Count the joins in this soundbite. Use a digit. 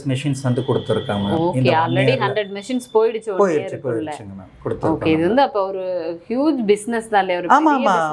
0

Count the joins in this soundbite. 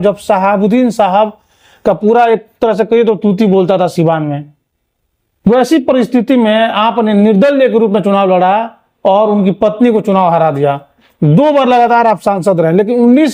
0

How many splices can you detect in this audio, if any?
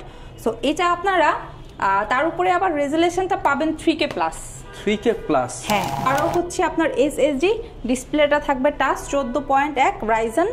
1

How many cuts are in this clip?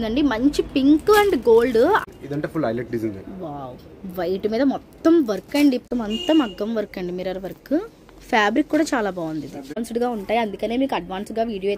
3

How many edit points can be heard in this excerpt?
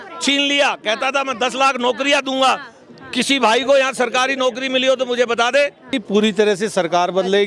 1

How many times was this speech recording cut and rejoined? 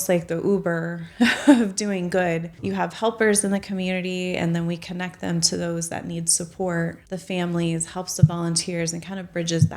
2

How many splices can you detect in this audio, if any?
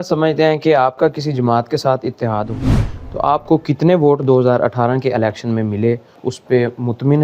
2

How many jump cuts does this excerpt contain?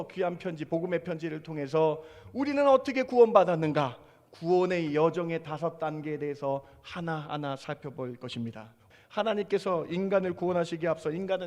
1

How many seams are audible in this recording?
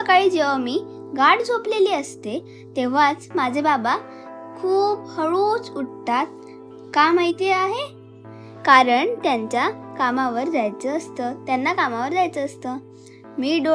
0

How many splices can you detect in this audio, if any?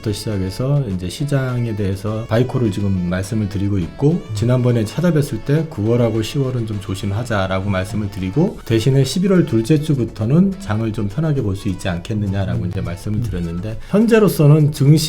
3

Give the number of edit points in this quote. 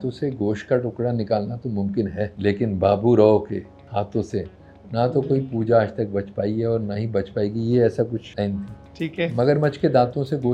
3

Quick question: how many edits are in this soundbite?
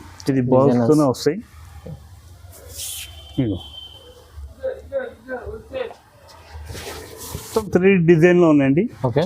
1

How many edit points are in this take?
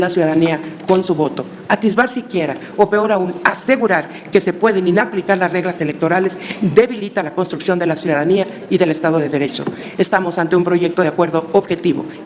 0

